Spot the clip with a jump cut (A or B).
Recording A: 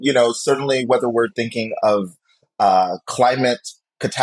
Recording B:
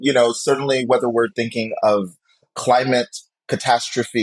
B